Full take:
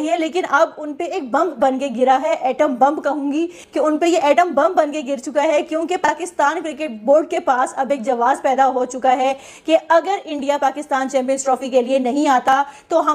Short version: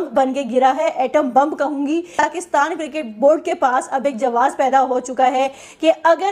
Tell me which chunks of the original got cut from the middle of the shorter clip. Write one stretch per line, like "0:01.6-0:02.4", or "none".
0:03.6-0:06.0